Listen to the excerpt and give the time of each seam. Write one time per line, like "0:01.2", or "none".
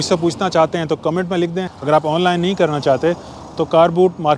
0:01.7